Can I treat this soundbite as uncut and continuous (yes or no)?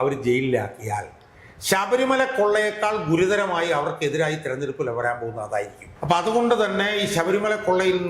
no